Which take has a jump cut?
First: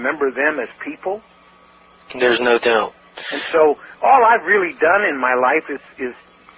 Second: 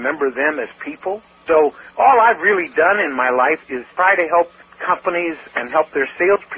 second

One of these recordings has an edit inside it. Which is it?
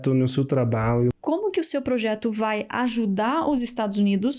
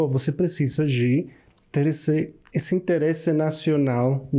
first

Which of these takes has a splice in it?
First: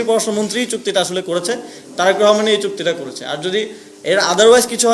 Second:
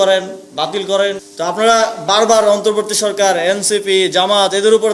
second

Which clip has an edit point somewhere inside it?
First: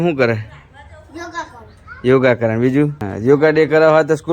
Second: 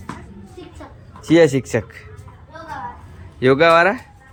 first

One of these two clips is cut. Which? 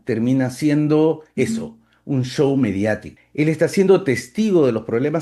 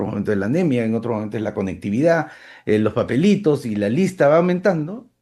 first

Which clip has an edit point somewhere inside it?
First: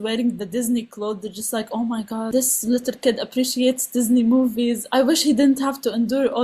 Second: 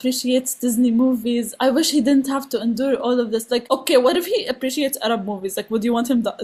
first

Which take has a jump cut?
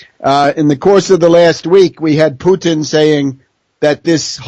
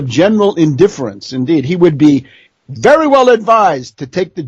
first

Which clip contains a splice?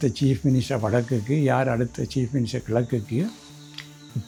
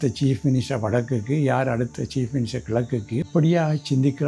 second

